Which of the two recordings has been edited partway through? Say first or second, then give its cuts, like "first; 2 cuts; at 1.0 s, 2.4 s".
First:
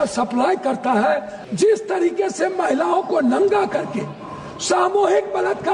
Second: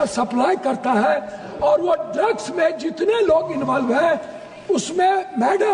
first; 1 cut; at 1.4 s